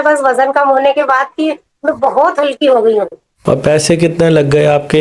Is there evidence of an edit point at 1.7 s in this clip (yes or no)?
no